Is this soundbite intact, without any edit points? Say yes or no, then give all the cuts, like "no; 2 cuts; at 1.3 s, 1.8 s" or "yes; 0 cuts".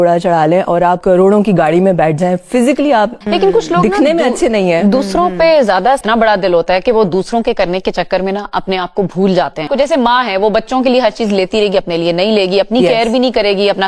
yes; 0 cuts